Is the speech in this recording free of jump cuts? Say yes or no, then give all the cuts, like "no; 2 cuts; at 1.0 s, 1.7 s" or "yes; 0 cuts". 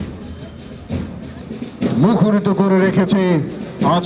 no; 1 cut; at 1.4 s